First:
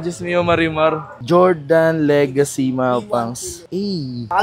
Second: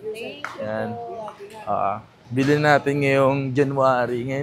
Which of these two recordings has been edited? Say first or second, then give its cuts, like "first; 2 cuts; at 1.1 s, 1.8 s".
first; 1 cut; at 1.1 s